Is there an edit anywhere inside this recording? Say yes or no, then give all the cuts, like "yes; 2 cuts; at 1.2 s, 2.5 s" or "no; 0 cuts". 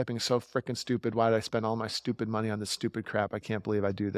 no; 0 cuts